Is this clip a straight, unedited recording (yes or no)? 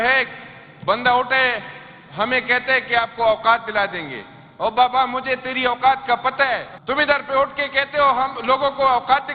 no